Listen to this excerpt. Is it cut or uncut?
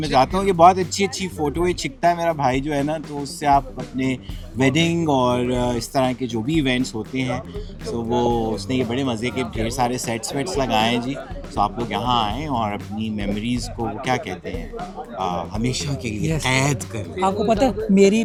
uncut